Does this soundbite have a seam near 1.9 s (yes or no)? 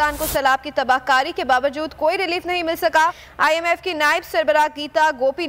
no